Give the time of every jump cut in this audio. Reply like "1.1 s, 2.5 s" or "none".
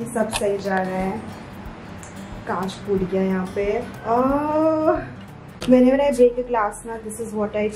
none

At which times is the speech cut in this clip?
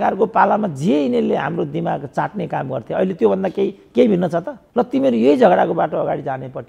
4.6 s

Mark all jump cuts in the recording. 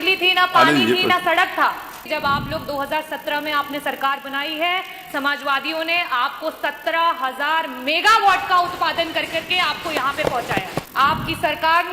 2.0 s, 10.8 s

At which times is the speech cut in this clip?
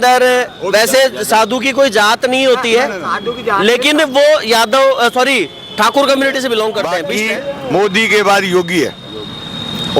7.0 s

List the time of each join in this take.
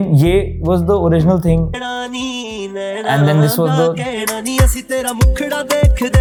none

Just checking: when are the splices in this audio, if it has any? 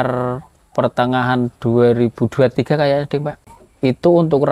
3.3 s

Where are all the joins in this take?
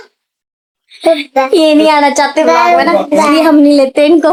none

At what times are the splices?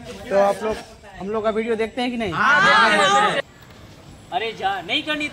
3.4 s

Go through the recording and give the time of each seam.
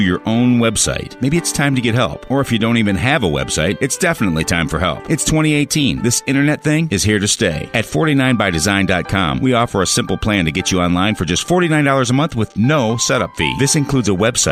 none

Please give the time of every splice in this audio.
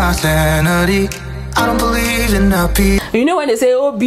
3.0 s

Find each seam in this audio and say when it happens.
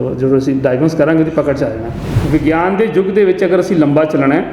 2.0 s

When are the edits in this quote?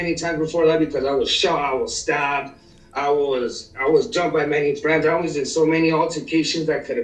none

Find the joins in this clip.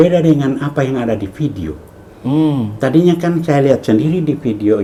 none

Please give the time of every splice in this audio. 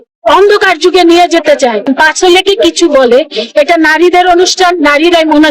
1.9 s

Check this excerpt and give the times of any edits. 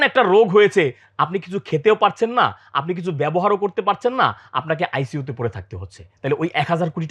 none

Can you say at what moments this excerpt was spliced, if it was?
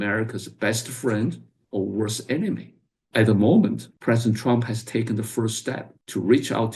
none

